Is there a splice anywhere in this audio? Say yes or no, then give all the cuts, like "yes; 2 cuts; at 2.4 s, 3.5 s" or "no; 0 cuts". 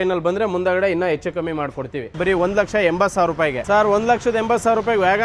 yes; 2 cuts; at 2.1 s, 3.6 s